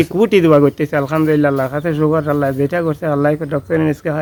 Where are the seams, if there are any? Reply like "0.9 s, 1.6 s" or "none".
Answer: none